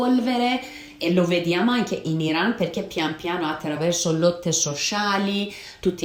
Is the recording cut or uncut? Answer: uncut